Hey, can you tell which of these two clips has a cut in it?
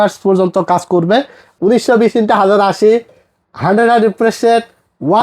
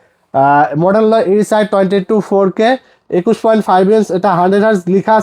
first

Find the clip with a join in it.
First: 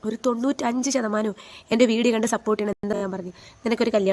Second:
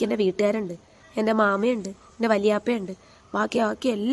first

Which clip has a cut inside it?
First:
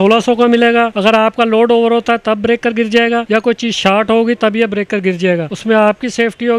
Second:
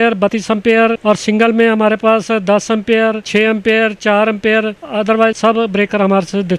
first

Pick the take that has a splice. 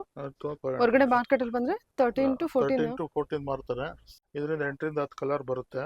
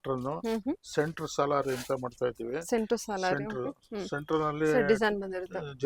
first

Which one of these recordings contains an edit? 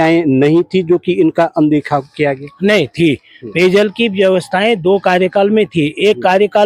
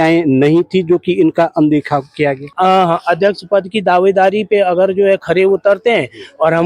second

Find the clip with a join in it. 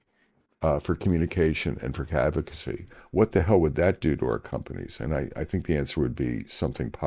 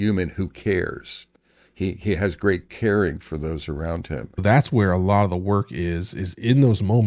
second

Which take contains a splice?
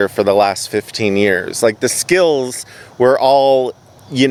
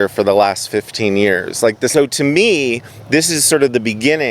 second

